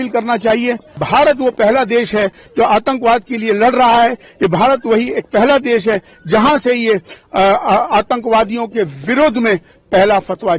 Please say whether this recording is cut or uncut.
cut